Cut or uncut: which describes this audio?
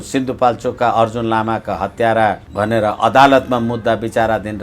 cut